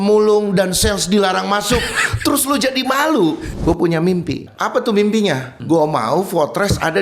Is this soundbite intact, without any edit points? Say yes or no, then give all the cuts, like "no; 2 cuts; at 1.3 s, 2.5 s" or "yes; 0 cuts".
no; 3 cuts; at 3.5 s, 4.5 s, 5.5 s